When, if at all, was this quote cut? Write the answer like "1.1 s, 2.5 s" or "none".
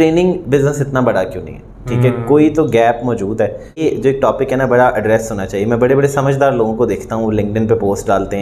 3.8 s